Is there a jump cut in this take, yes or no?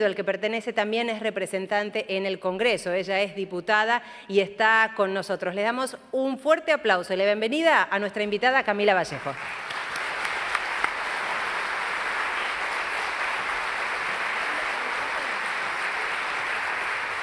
yes